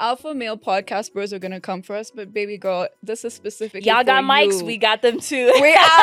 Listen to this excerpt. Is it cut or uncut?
uncut